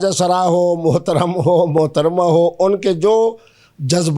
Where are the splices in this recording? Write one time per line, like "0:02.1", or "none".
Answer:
none